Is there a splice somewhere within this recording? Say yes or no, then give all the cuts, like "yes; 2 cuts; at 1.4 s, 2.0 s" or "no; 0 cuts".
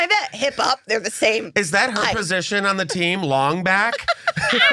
no; 0 cuts